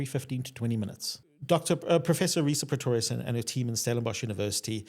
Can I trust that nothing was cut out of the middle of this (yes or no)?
no